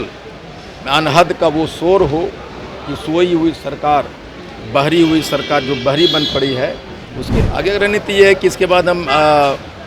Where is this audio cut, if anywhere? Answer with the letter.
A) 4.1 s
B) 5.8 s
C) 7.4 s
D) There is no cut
C